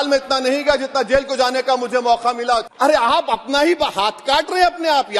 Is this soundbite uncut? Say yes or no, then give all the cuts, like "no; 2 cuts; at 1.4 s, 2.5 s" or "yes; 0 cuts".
no; 1 cut; at 2.7 s